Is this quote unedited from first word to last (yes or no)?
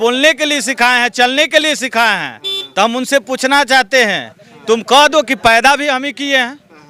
yes